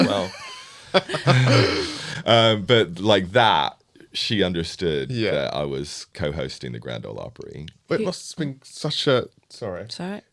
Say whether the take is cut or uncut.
uncut